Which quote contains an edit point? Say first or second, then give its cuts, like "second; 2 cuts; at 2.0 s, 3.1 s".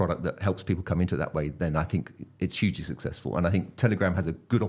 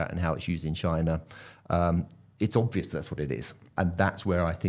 second; 1 cut; at 3.7 s